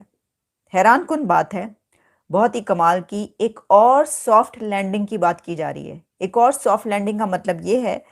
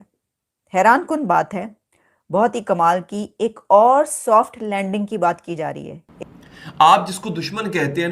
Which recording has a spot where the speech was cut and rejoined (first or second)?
second